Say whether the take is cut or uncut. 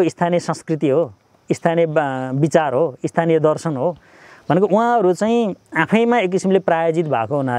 uncut